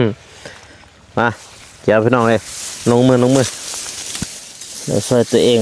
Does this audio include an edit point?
yes; 1 cut; at 3.5 s

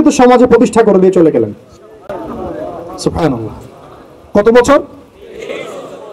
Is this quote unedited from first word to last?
yes; 0 cuts

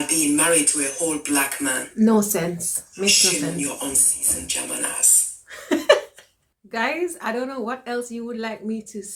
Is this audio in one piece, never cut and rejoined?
yes; 0 cuts

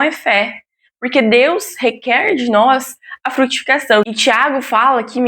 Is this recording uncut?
no; 1 cut; at 4.0 s

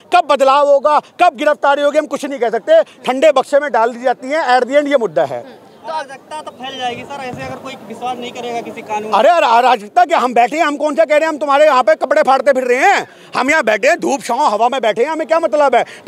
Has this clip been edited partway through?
no; 0 cuts

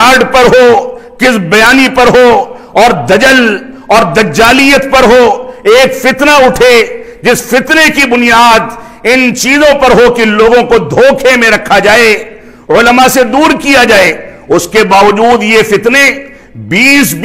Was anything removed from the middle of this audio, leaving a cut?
no; 0 cuts

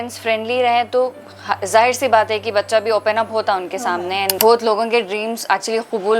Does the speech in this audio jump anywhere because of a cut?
yes; 1 cut; at 4.3 s

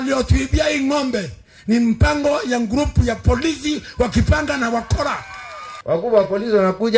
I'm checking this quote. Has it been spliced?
yes; 1 cut; at 5.7 s

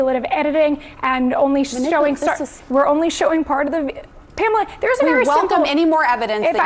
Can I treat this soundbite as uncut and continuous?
yes; 0 cuts

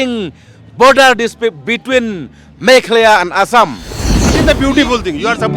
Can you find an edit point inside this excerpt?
yes; 1 cut; at 4.2 s

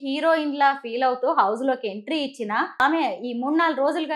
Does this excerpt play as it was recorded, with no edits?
no; 1 cut; at 2.8 s

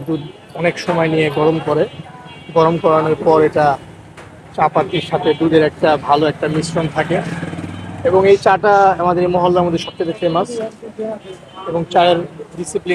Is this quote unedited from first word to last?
yes; 0 cuts

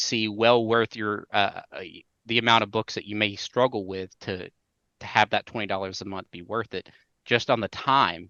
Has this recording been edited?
no; 0 cuts

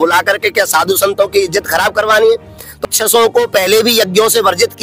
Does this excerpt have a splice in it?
yes; 1 cut; at 2.8 s

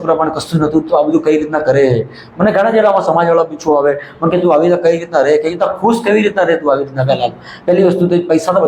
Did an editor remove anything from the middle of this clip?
no; 0 cuts

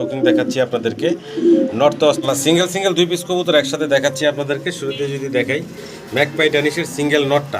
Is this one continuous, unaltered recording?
no; 1 cut; at 2.2 s

